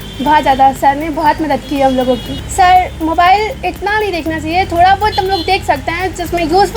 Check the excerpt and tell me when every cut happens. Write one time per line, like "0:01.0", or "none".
0:02.4